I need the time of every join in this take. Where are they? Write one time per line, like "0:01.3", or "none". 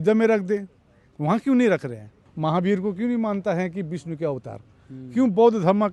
0:02.2